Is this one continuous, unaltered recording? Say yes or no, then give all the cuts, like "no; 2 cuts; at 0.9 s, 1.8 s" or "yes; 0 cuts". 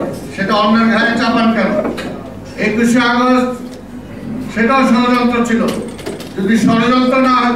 yes; 0 cuts